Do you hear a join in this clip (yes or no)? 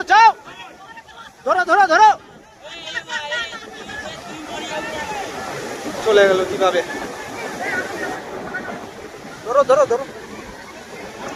no